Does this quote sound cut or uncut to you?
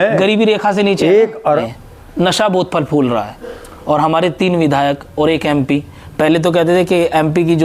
cut